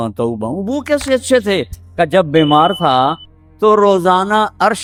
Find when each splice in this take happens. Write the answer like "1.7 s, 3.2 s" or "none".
none